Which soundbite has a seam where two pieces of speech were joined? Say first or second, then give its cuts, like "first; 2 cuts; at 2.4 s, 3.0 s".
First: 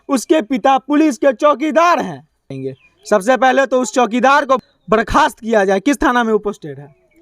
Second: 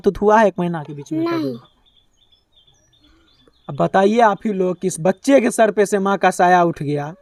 first; 2 cuts; at 2.4 s, 4.7 s